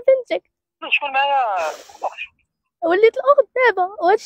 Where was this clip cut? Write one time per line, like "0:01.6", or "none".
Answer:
0:00.9